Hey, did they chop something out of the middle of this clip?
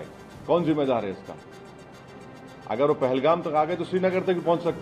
no; 0 cuts

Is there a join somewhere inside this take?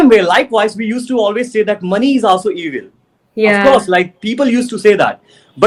no; 0 cuts

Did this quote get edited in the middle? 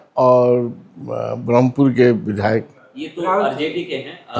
no; 0 cuts

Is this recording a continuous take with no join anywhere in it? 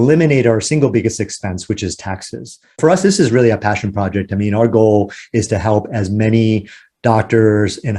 no; 1 cut; at 2.8 s

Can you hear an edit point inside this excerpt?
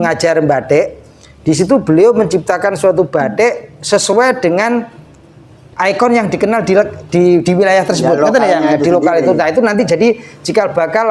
no; 0 cuts

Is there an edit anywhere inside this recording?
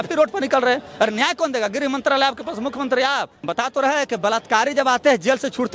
yes; 1 cut; at 3.4 s

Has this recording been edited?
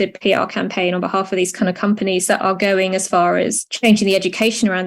yes; 1 cut; at 3.6 s

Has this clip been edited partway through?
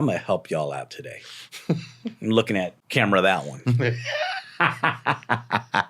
yes; 1 cut; at 2.8 s

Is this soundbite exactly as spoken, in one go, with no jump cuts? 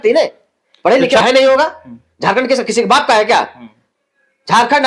no; 1 cut; at 1.2 s

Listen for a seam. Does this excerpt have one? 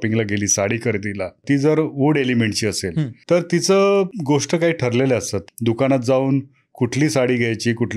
yes; 4 cuts; at 1.4 s, 3.1 s, 4.2 s, 5.4 s

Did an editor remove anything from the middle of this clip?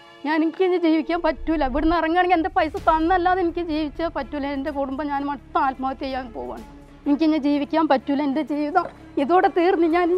yes; 1 cut; at 6.9 s

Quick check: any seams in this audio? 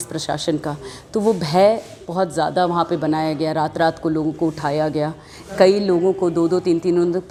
no; 0 cuts

